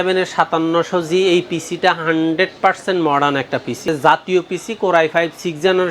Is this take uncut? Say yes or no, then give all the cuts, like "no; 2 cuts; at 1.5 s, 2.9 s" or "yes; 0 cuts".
no; 1 cut; at 3.9 s